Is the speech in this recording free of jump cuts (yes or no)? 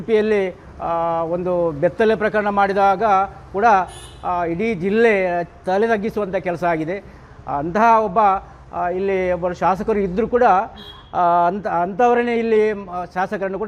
yes